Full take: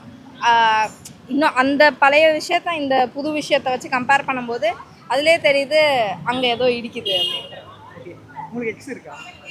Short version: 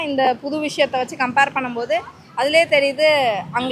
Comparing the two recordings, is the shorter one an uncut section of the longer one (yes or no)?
yes